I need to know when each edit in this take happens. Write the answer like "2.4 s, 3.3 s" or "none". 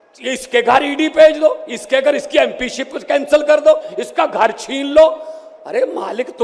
none